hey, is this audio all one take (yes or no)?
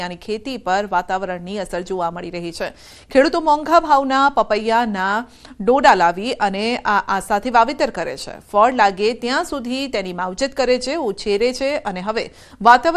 yes